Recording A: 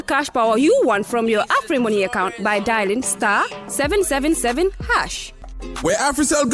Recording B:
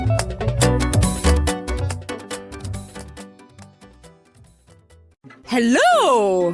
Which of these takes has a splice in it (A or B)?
B